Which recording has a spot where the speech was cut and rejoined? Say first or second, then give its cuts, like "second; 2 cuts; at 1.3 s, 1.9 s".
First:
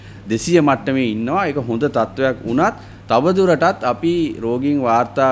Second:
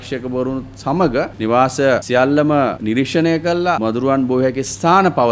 second; 4 cuts; at 1.3 s, 2.0 s, 2.8 s, 3.8 s